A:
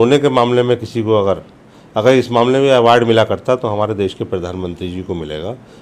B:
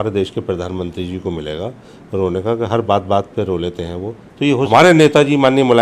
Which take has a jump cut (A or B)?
B